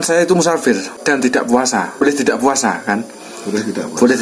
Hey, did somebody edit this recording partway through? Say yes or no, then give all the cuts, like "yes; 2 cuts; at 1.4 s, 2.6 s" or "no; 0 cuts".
yes; 2 cuts; at 0.9 s, 2.0 s